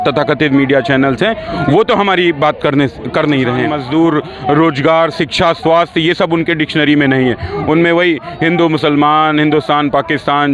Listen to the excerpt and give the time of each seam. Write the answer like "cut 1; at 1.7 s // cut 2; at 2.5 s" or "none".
cut 1; at 3.7 s